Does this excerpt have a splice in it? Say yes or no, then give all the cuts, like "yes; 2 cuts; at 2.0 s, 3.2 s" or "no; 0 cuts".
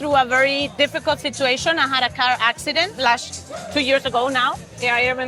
no; 0 cuts